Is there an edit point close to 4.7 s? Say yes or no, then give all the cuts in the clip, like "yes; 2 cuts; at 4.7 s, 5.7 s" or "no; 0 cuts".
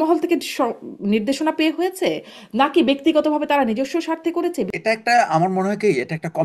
yes; 1 cut; at 4.7 s